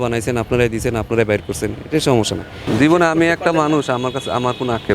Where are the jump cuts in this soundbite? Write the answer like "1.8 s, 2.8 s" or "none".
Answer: 2.5 s